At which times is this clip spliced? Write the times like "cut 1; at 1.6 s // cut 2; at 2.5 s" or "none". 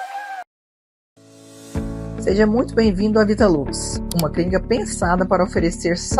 cut 1; at 1.2 s